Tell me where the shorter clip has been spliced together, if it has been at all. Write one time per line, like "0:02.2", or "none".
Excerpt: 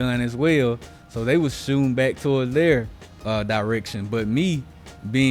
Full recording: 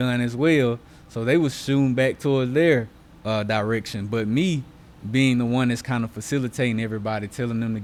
none